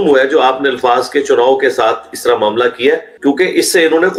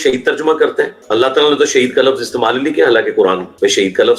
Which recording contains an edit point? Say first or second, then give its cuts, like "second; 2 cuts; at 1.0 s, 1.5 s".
second; 1 cut; at 1.0 s